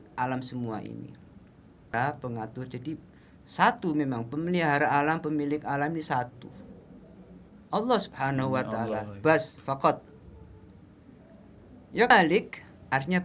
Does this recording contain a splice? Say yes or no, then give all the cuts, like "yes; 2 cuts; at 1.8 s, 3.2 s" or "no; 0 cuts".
yes; 2 cuts; at 1.9 s, 12.1 s